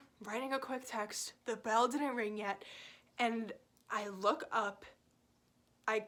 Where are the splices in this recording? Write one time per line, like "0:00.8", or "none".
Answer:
none